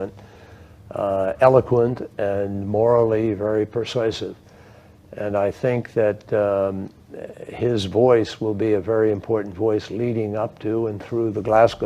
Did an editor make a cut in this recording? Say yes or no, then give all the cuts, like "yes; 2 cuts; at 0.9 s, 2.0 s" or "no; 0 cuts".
yes; 1 cut; at 4.6 s